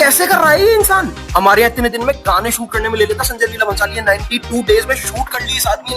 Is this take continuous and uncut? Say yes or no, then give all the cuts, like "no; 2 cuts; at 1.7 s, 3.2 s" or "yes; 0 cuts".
no; 1 cut; at 1.2 s